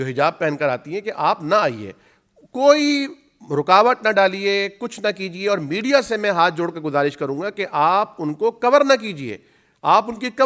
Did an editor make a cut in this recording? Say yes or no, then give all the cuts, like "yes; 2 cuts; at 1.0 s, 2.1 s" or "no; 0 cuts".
no; 0 cuts